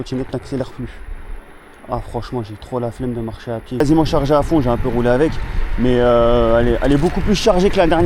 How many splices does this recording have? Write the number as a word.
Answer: one